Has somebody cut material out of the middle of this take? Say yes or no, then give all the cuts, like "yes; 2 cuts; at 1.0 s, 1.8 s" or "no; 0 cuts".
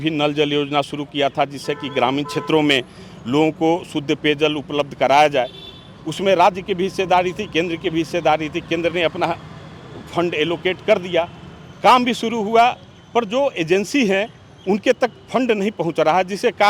no; 0 cuts